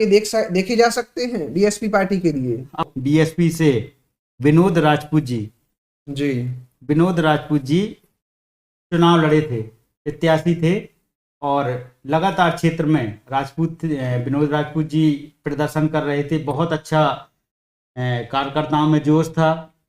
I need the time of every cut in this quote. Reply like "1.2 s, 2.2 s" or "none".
2.9 s